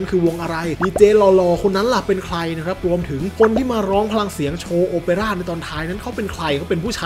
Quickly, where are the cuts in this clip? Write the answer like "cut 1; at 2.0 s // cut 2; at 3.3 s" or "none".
none